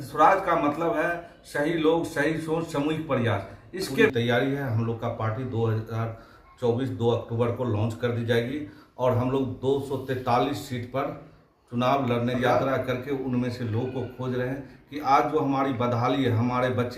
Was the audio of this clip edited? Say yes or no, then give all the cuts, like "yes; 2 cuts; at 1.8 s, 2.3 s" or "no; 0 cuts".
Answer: yes; 2 cuts; at 4.1 s, 12.4 s